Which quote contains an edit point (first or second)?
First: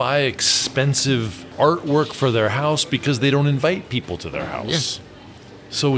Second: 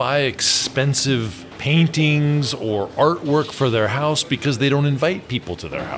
first